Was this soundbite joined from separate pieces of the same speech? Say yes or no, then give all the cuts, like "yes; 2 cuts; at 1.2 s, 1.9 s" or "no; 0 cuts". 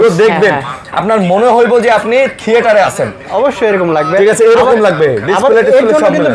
no; 0 cuts